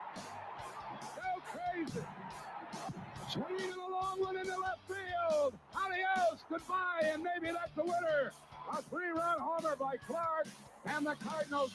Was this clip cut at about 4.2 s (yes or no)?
no